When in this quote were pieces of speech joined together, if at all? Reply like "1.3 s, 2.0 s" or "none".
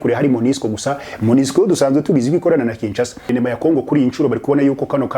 3.3 s